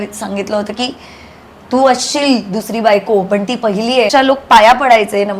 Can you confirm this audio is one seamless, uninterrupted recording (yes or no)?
no